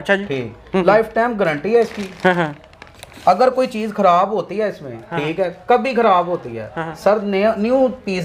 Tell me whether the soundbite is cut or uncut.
uncut